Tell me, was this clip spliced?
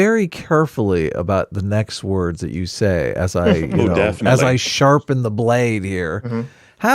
no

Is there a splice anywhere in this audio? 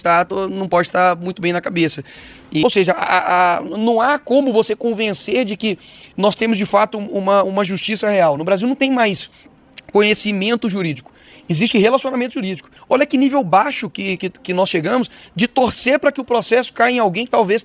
yes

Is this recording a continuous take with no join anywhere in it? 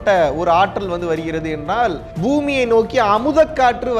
no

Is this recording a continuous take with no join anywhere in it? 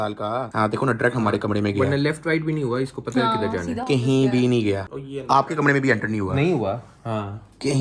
yes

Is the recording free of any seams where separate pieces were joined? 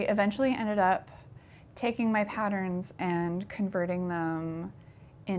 yes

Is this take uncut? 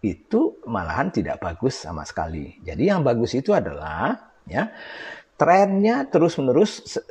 yes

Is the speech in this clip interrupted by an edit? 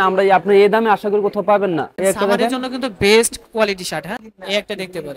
yes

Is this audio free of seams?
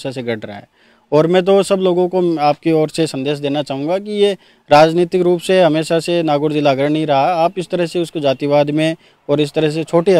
yes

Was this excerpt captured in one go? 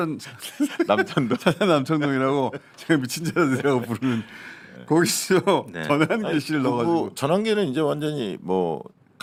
yes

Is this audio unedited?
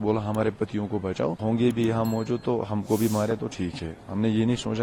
no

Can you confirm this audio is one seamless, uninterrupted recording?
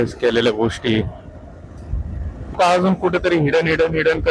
no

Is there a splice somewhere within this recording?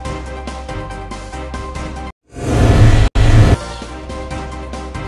yes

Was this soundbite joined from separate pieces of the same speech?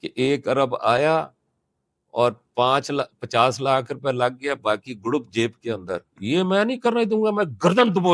no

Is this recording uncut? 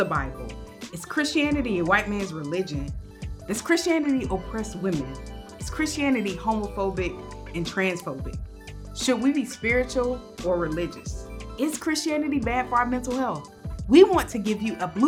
yes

